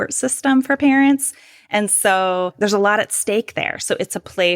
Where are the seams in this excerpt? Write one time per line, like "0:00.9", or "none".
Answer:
0:02.5